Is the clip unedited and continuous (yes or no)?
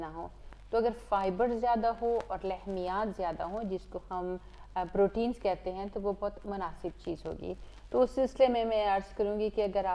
yes